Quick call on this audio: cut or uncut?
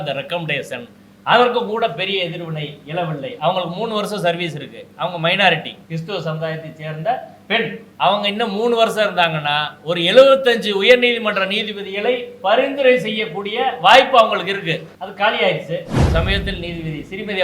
cut